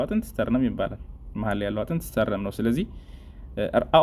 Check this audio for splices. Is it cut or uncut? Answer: uncut